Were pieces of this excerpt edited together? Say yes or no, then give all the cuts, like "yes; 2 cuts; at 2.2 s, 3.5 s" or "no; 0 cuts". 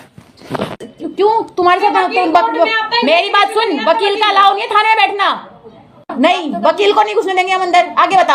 yes; 2 cuts; at 0.8 s, 6.1 s